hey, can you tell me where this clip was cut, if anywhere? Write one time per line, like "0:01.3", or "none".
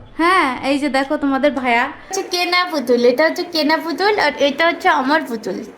0:02.2